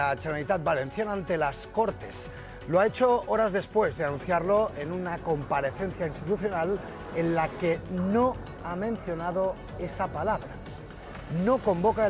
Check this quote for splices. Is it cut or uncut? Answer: uncut